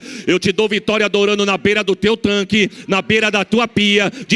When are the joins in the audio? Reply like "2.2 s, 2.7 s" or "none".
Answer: none